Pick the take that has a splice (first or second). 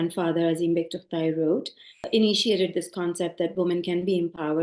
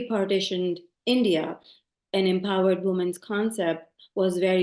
first